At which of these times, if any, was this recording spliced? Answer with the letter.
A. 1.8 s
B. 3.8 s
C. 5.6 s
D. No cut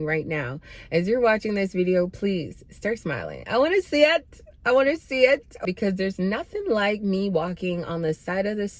C